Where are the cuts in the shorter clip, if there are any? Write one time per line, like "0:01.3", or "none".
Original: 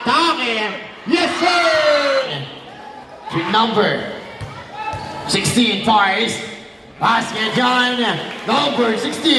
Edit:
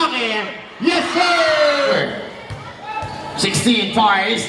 0:02.0